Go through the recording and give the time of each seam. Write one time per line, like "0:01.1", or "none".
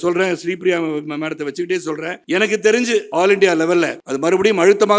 0:02.2
0:03.1
0:04.0